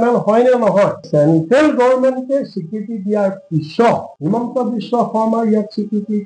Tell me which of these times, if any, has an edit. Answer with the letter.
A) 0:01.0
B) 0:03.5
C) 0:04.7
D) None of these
A